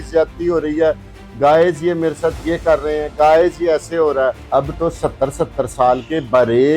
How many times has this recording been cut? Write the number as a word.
one